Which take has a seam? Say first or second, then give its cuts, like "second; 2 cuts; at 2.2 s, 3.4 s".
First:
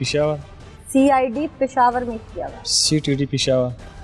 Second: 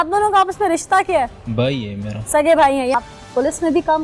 second; 1 cut; at 2.9 s